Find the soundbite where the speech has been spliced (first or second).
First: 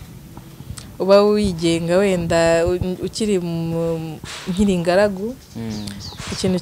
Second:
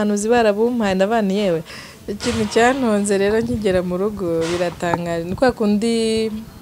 second